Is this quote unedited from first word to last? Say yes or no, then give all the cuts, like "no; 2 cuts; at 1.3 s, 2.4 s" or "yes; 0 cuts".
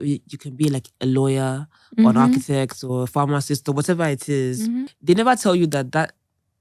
no; 1 cut; at 4.9 s